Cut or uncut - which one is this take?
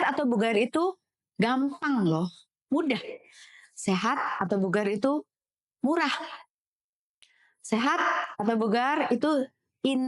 uncut